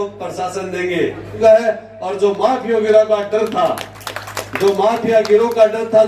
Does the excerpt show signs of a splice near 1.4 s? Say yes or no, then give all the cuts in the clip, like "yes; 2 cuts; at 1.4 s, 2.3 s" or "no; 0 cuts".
yes; 1 cut; at 1.4 s